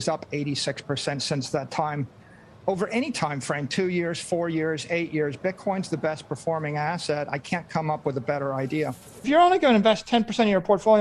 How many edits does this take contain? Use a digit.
1